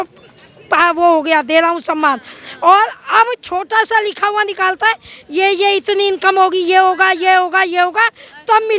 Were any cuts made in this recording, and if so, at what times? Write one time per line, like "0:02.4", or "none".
none

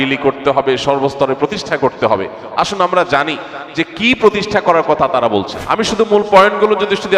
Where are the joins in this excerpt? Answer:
0:05.6

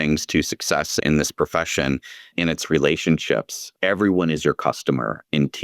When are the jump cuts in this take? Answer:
0:01.0
0:02.3

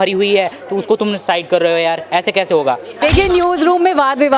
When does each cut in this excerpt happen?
0:03.0

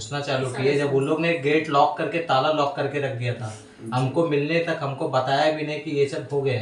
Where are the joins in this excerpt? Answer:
none

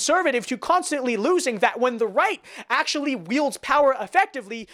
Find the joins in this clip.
none

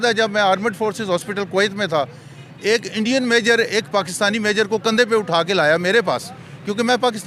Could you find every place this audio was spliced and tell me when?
none

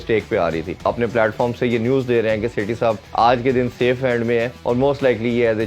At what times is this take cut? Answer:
0:00.9
0:03.0
0:04.5

